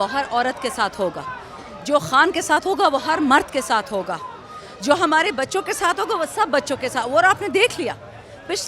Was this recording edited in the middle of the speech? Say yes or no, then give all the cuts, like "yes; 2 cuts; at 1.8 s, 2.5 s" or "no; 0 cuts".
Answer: no; 0 cuts